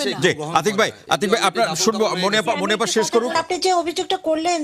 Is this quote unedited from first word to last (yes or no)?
no